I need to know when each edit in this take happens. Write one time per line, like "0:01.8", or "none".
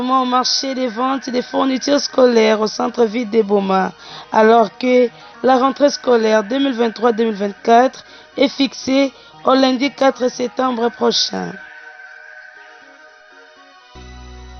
none